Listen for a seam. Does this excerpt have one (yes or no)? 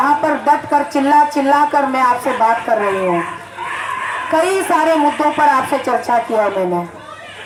no